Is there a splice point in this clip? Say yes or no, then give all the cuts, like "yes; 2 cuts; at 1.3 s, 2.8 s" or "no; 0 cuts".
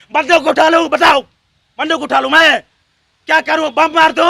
no; 0 cuts